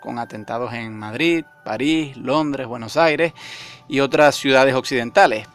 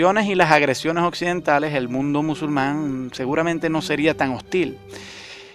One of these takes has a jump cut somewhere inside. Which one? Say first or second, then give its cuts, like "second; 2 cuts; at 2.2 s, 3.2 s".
first; 1 cut; at 3.3 s